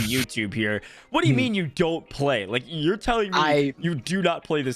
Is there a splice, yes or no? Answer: no